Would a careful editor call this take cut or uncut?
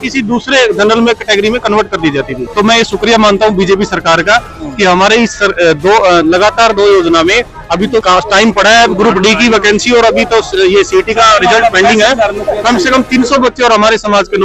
uncut